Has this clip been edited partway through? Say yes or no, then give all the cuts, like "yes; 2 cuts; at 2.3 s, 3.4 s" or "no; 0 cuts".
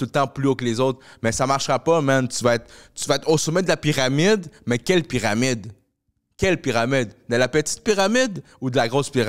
no; 0 cuts